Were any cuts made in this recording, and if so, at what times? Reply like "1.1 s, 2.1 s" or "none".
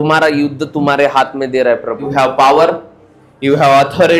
2.0 s